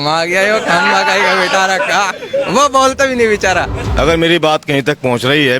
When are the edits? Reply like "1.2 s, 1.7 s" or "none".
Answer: 3.8 s